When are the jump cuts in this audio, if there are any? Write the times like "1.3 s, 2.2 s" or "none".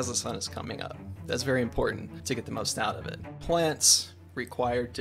2.1 s, 3.4 s